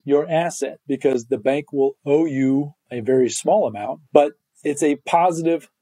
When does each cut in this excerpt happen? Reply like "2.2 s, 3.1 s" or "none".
3.9 s